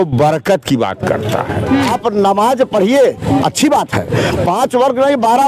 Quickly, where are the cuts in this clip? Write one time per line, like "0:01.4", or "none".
0:01.9